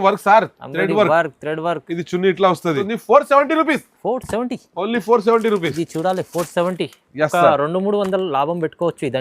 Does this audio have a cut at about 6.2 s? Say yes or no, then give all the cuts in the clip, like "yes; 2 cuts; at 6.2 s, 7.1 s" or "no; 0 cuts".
no; 1 cut; at 2.9 s